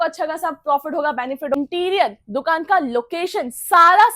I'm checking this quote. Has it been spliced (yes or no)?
yes